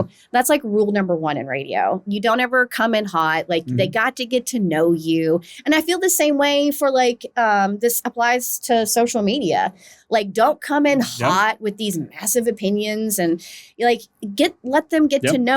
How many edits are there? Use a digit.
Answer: 0